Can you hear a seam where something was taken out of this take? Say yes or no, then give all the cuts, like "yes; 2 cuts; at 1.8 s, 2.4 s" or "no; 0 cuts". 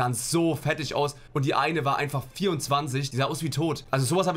yes; 2 cuts; at 1.2 s, 3.2 s